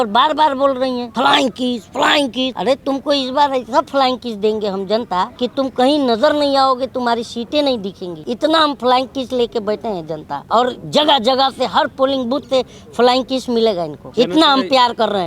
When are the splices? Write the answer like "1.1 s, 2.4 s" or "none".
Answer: 1.1 s, 2.5 s, 5.3 s, 8.1 s, 10.3 s, 14.0 s